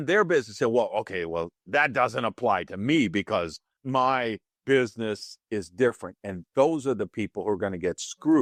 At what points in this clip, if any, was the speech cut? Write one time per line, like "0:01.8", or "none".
none